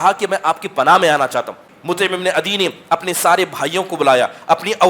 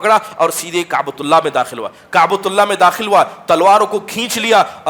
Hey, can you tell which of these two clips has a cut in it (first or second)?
first